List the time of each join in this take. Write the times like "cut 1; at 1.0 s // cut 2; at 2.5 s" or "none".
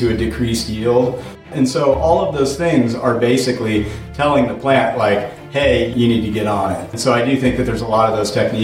cut 1; at 1.4 s // cut 2; at 5.9 s // cut 3; at 6.9 s